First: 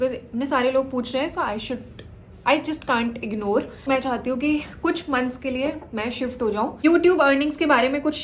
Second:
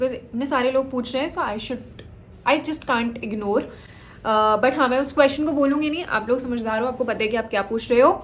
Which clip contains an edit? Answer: first; 2 cuts; at 3.8 s, 6.8 s

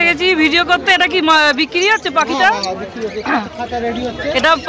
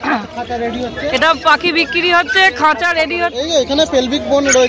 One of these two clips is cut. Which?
second; 1 cut; at 3.3 s

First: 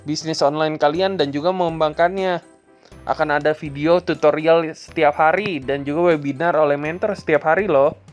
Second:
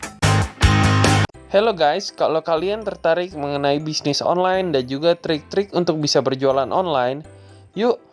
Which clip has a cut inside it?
second; 1 cut; at 1.2 s

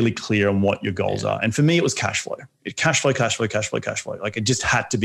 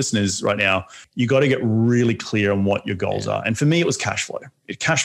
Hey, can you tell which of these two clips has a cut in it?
second; 1 cut; at 1.0 s

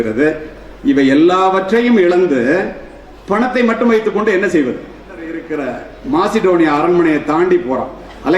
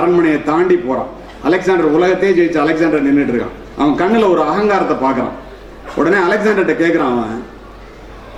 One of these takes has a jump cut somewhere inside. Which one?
first; 1 cut; at 5.4 s

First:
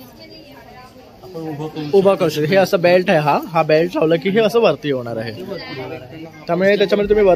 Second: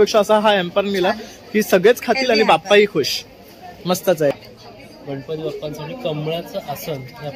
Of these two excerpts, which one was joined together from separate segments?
second; 1 cut; at 4.3 s

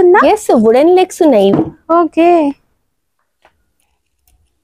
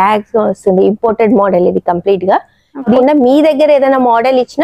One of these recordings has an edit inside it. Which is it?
second; 1 cut; at 2.9 s

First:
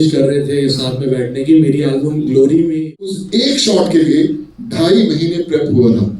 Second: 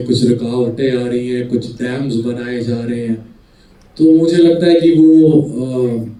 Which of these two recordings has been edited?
first; 1 cut; at 3.1 s

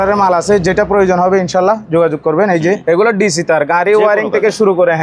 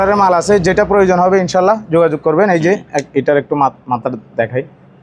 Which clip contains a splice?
first; 1 cut; at 2.8 s

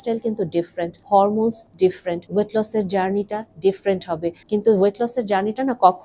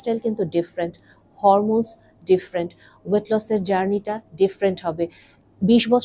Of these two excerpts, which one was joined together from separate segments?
first; 3 cuts; at 1.0 s, 1.9 s, 4.4 s

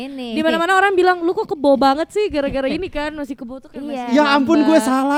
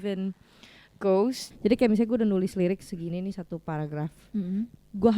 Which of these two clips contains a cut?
second; 1 cut; at 1.5 s

